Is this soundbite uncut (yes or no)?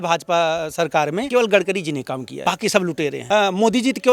no